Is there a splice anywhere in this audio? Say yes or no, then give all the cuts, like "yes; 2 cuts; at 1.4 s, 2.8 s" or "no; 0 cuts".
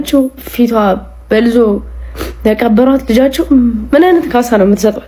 no; 0 cuts